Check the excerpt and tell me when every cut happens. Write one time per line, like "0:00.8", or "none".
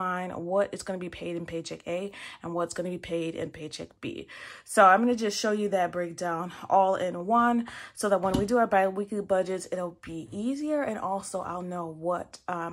none